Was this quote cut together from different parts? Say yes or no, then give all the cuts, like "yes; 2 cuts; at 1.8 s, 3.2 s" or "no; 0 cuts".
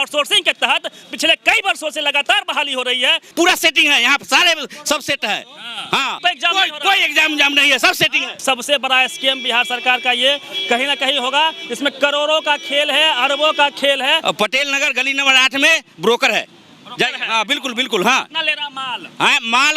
yes; 4 cuts; at 3.2 s, 6.2 s, 8.4 s, 14.2 s